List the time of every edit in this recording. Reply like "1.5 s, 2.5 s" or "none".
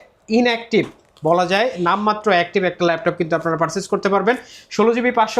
none